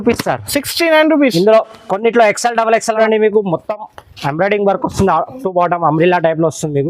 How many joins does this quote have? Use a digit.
1